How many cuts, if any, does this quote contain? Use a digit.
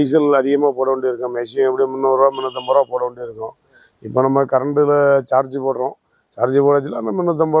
0